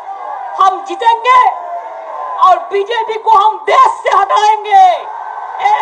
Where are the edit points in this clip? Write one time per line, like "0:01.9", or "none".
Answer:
none